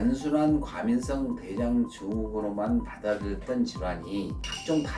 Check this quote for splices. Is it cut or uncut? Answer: uncut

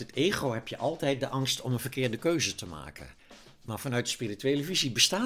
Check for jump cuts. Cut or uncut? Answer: uncut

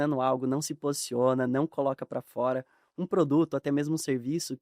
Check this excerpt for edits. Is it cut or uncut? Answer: uncut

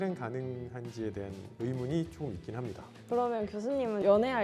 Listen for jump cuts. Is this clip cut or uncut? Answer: cut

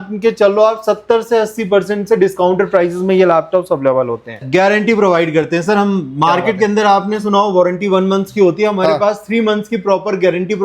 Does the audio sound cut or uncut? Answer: cut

